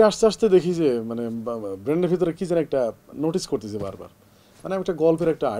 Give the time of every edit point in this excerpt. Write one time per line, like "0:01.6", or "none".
none